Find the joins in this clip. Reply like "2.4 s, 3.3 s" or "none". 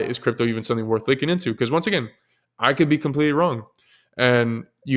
none